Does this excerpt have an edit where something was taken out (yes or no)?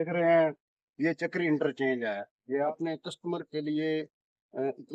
yes